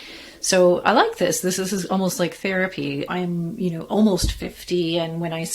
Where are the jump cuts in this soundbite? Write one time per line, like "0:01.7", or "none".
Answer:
0:01.5
0:03.1